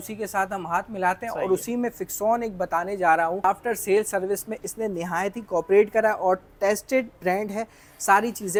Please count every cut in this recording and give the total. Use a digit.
0